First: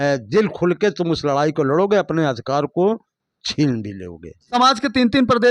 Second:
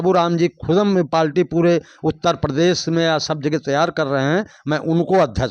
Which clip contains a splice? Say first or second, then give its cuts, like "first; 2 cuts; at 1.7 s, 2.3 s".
first; 1 cut; at 4.5 s